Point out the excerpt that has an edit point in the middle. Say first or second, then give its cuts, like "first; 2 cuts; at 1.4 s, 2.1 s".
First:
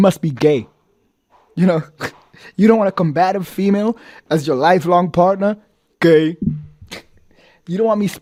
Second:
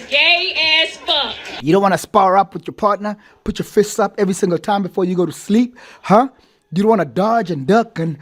second; 1 cut; at 1.6 s